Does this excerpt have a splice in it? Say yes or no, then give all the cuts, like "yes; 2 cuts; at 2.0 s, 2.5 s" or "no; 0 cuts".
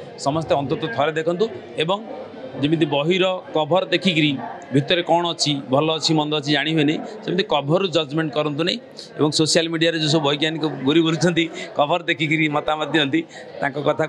no; 0 cuts